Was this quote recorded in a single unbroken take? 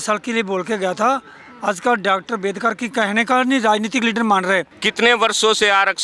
no; 1 cut; at 4.8 s

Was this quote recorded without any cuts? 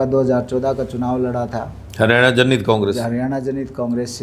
yes; 0 cuts

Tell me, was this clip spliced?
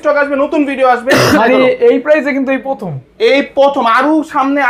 yes; 1 cut; at 1.4 s

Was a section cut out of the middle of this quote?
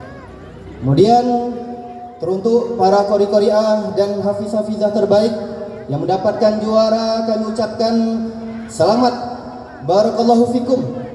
no; 0 cuts

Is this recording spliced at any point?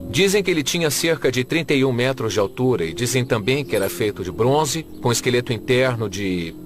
yes; 1 cut; at 1.9 s

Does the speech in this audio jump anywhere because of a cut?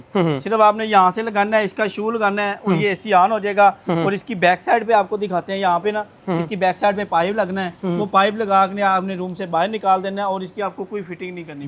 no; 0 cuts

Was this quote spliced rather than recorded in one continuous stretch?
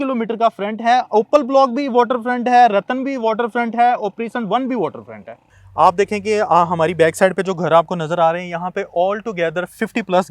yes; 1 cut; at 5.4 s

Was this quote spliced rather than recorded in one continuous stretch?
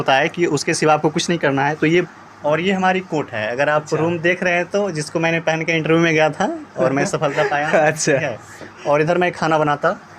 yes; 1 cut; at 2.1 s

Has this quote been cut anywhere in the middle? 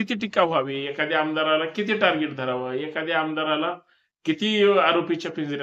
no; 0 cuts

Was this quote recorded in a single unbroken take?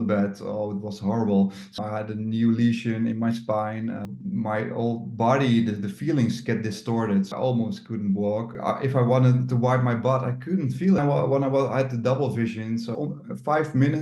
no; 6 cuts; at 1.8 s, 4.0 s, 7.3 s, 8.5 s, 11.0 s, 12.9 s

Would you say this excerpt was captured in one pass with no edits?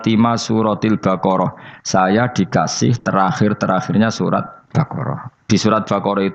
no; 1 cut; at 4.6 s

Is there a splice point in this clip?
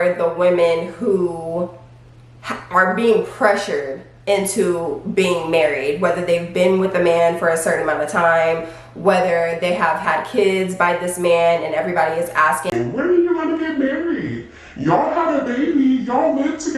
no; 0 cuts

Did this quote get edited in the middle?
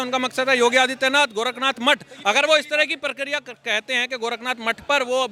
no; 0 cuts

